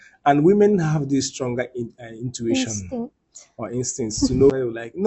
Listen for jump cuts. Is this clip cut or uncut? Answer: uncut